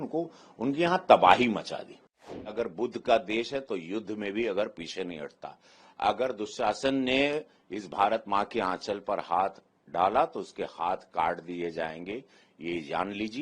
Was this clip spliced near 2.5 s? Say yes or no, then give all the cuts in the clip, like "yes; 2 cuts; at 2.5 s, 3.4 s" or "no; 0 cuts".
yes; 1 cut; at 2.5 s